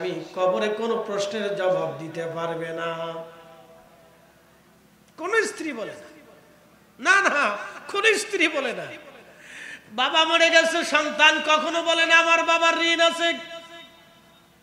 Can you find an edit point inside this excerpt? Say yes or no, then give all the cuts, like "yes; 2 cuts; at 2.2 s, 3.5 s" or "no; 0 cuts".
no; 0 cuts